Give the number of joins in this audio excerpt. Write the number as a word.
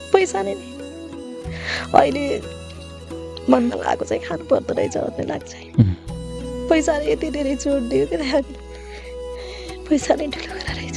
zero